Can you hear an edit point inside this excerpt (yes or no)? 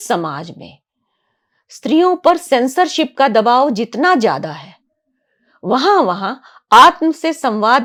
no